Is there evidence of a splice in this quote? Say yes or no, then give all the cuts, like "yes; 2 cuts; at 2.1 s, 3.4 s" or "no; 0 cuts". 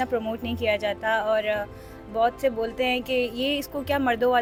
no; 0 cuts